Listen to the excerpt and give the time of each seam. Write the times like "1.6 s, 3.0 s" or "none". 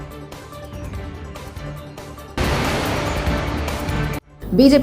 none